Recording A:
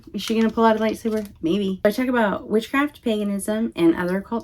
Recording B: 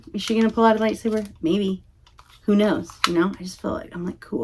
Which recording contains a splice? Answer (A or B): A